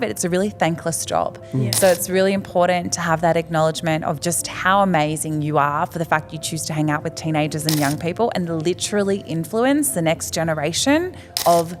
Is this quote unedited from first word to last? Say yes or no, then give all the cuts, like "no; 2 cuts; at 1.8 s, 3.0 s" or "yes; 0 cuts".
yes; 0 cuts